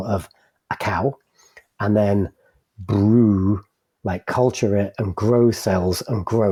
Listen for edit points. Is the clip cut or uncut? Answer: uncut